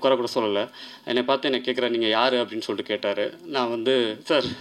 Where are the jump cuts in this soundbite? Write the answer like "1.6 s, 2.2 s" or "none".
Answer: none

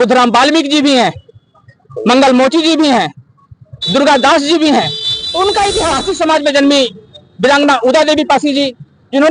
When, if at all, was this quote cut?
6.0 s

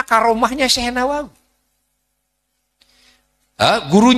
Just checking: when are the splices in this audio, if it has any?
none

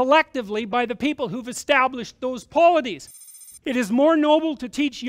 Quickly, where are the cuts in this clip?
3.4 s

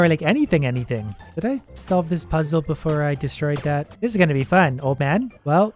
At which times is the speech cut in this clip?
1.2 s, 3.9 s

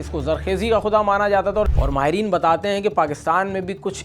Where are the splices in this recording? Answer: 1.7 s

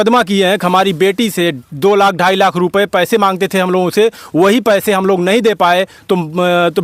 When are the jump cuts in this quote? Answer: none

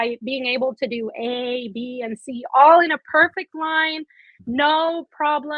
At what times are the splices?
none

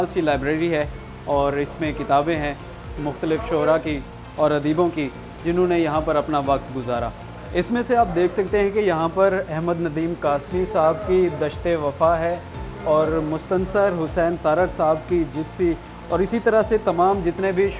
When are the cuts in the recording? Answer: none

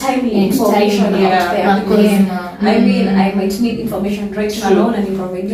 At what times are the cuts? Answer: none

